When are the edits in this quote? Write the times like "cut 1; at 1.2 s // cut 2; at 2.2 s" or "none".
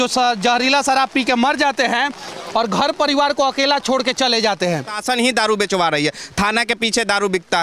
cut 1; at 5.0 s